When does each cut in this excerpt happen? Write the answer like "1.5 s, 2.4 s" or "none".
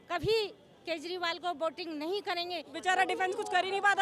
2.7 s